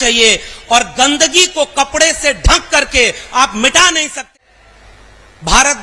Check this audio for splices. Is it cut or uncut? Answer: cut